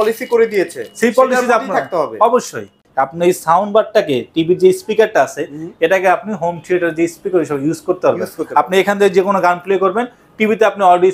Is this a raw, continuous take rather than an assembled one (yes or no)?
no